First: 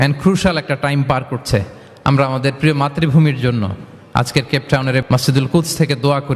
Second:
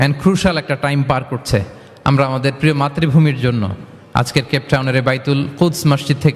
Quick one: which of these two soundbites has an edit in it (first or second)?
first